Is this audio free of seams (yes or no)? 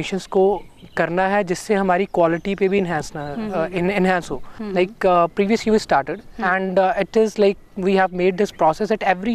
no